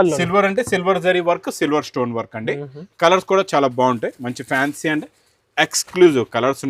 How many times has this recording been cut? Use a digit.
0